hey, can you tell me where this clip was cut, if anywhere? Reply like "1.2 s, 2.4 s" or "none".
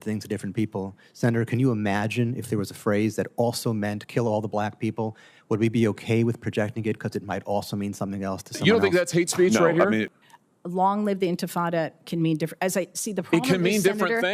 8.5 s